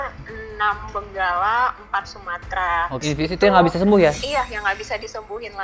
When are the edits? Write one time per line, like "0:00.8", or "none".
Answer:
0:03.0

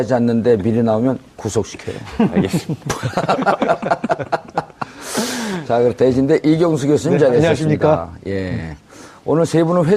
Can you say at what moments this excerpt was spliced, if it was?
0:05.3

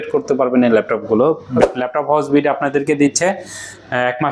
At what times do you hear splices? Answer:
0:01.7

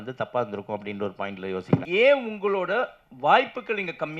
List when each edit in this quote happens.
0:01.8

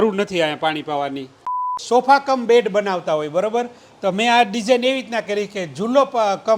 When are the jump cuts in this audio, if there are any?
0:01.7

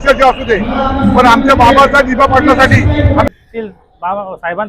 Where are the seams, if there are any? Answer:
0:03.3

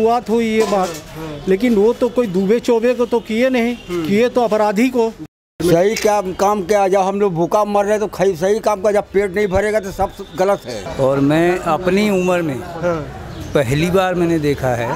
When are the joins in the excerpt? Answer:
0:05.6
0:10.8

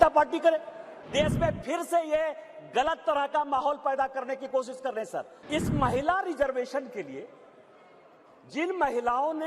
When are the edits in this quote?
0:01.0
0:05.4

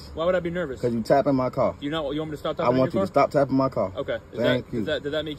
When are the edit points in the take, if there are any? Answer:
none

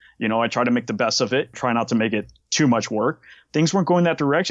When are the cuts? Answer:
0:01.6
0:03.3

